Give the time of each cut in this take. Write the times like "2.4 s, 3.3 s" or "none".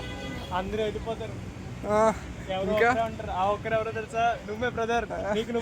none

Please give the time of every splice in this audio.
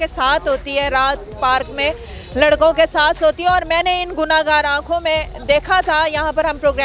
none

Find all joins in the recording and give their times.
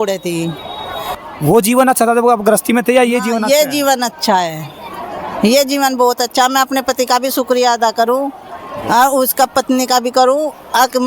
1.1 s

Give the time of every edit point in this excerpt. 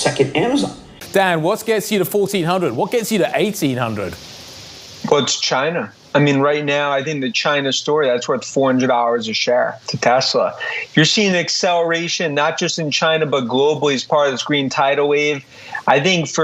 0.9 s

